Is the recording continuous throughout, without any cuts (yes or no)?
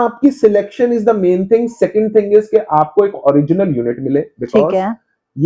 yes